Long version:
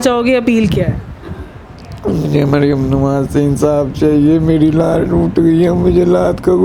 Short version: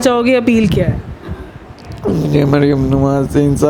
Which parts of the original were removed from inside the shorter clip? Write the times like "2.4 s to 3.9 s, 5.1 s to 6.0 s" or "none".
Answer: none